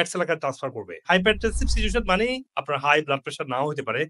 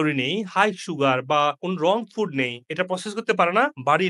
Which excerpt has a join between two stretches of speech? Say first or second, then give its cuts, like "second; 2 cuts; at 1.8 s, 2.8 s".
first; 1 cut; at 1.0 s